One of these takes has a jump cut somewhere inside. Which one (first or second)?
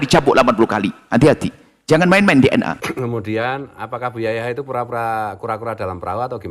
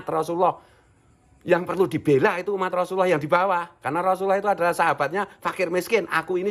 first